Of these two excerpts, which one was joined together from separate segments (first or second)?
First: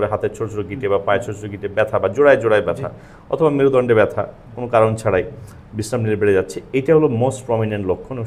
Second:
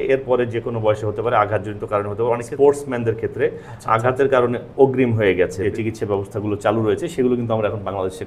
second